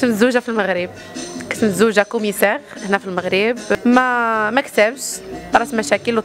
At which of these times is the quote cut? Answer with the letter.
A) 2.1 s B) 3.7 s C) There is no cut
B